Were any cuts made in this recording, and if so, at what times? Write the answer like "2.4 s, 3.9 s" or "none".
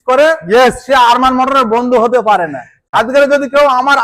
2.9 s